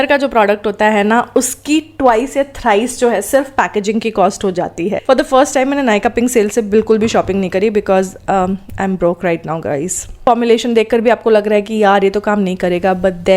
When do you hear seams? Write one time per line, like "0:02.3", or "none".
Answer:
0:05.0
0:10.2

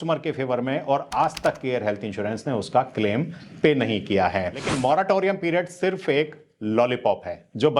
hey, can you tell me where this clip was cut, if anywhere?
0:04.7

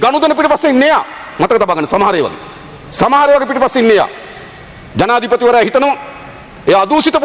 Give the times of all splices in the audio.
none

